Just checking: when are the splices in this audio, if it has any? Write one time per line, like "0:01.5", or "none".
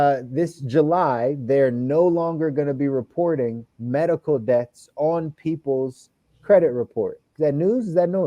0:07.2